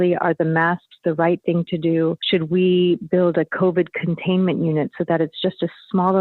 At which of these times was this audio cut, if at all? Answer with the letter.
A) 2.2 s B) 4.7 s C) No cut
A